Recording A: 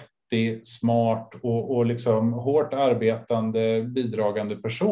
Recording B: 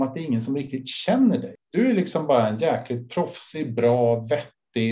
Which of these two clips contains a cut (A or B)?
B